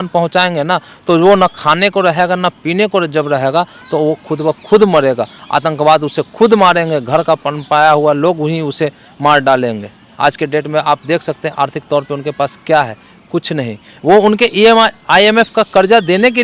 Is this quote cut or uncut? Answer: uncut